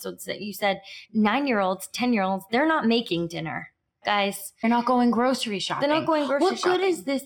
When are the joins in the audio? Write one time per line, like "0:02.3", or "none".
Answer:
0:04.6